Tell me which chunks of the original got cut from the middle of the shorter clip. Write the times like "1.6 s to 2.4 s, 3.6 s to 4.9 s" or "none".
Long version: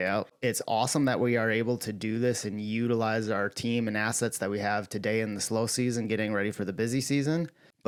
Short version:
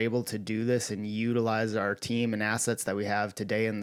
none